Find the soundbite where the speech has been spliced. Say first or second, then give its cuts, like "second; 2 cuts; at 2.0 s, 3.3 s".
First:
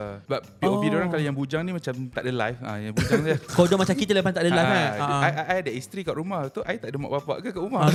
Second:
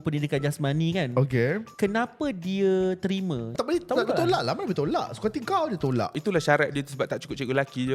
second; 3 cuts; at 1.7 s, 3.5 s, 6.2 s